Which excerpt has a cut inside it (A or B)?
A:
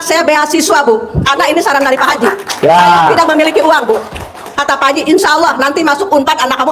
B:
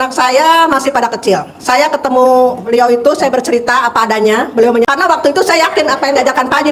B